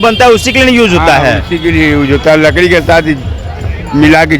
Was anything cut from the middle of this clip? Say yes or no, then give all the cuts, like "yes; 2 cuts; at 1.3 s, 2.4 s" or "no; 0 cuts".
no; 0 cuts